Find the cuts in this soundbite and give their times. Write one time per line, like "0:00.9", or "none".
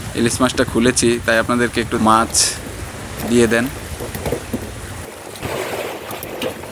0:02.0